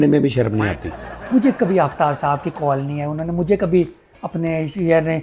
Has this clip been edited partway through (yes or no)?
yes